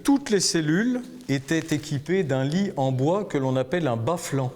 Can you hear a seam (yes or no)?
yes